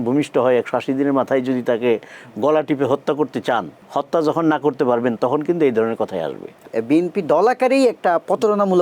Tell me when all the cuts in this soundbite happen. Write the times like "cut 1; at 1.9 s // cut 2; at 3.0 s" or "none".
cut 1; at 3.8 s // cut 2; at 6.7 s